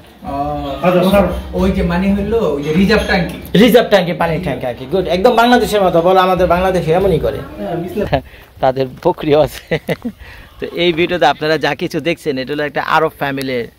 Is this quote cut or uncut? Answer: cut